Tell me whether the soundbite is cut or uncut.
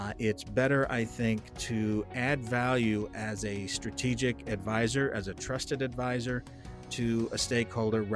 uncut